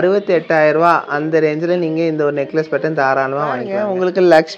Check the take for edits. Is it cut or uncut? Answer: cut